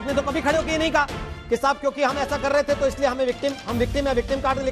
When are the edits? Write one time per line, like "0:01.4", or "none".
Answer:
none